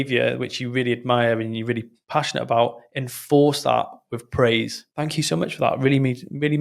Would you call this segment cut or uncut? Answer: uncut